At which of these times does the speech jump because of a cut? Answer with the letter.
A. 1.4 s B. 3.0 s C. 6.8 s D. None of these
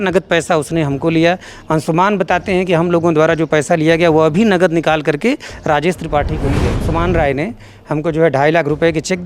C